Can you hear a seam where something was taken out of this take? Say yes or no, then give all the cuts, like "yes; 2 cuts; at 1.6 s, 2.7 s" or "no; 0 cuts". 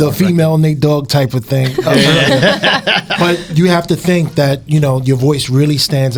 no; 0 cuts